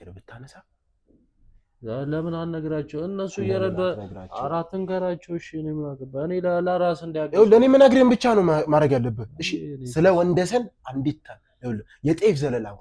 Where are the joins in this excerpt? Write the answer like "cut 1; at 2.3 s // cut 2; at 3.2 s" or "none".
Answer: none